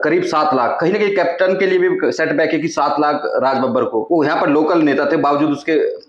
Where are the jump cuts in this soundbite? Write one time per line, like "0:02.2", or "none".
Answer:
0:04.0